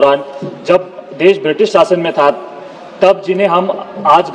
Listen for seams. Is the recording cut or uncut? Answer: uncut